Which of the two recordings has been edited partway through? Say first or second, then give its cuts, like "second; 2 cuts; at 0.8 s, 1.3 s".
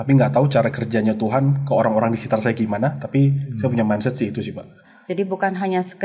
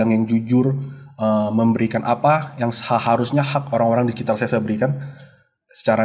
first; 1 cut; at 4.9 s